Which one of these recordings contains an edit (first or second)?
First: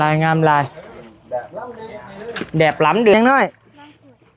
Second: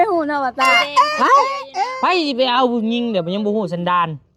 first